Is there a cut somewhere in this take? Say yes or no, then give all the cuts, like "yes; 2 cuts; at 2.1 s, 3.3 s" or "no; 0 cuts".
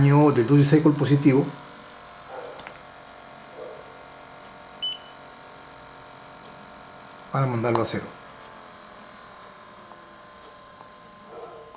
no; 0 cuts